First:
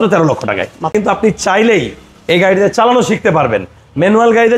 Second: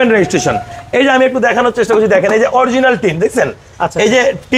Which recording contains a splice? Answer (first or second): first